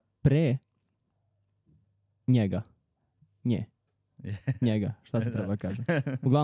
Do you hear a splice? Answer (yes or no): no